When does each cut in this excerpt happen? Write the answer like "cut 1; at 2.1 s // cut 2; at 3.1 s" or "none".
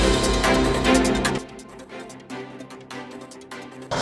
cut 1; at 1.0 s